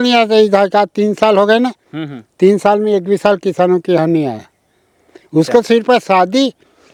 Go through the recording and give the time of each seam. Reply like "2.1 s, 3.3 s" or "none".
none